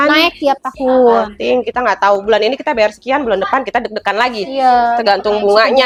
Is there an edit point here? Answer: no; 0 cuts

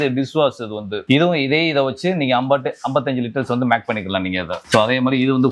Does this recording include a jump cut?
no; 0 cuts

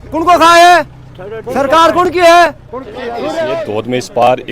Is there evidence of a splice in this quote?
yes; 1 cut; at 3.4 s

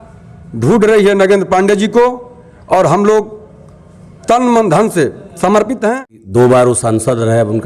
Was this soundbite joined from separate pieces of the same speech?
yes; 1 cut; at 6.1 s

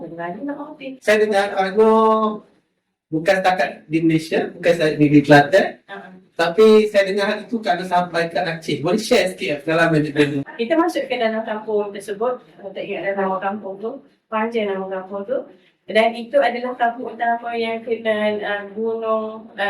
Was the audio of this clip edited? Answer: yes; 2 cuts; at 0.9 s, 10.4 s

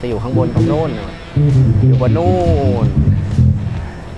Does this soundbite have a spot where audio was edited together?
no; 0 cuts

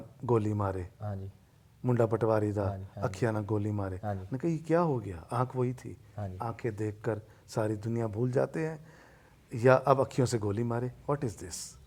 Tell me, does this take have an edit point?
no; 0 cuts

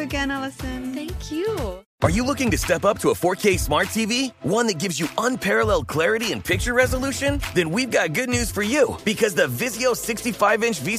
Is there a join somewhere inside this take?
yes; 1 cut; at 1.8 s

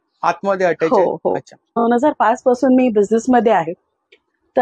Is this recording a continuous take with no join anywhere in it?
no; 1 cut; at 1.8 s

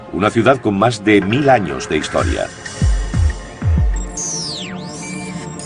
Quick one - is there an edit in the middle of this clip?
yes; 1 cut; at 3.8 s

